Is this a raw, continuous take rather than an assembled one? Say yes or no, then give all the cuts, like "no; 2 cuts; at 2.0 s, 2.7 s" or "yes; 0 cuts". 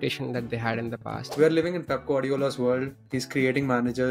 no; 1 cut; at 1.3 s